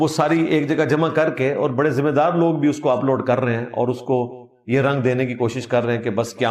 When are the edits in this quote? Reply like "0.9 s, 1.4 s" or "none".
none